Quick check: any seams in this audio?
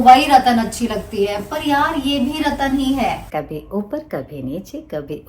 yes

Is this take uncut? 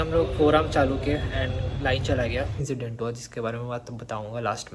no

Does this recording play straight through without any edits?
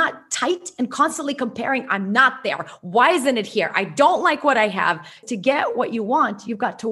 no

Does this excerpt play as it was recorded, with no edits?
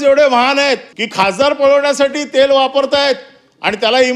no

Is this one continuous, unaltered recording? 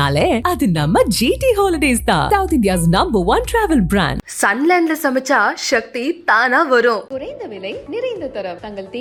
yes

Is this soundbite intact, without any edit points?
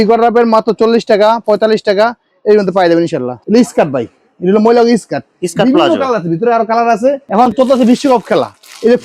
no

